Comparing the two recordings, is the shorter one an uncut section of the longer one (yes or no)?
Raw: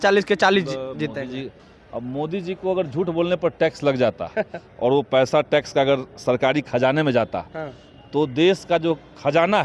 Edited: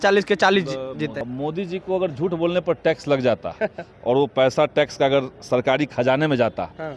no